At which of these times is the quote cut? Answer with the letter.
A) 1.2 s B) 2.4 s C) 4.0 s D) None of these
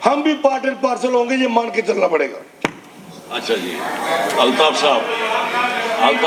D